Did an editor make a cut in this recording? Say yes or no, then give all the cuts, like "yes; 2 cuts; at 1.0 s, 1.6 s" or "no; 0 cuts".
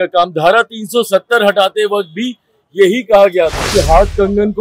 yes; 1 cut; at 3.6 s